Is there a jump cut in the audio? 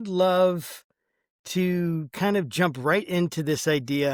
no; 0 cuts

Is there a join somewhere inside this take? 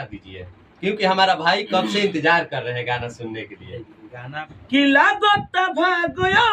yes; 1 cut; at 4.5 s

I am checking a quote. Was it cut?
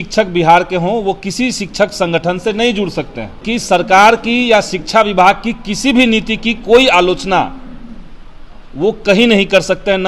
yes; 1 cut; at 3.4 s

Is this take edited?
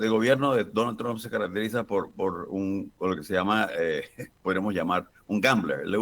no; 0 cuts

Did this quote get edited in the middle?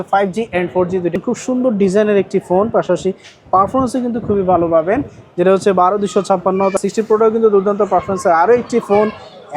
yes; 2 cuts; at 1.2 s, 6.8 s

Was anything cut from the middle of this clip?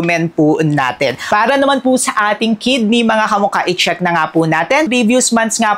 yes; 2 cuts; at 1.2 s, 4.9 s

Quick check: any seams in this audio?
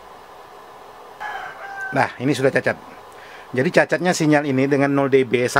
yes; 1 cut; at 1.2 s

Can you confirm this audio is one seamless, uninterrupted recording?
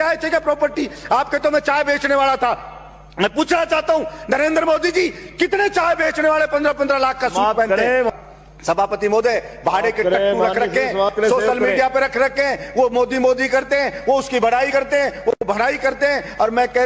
no; 1 cut; at 8.1 s

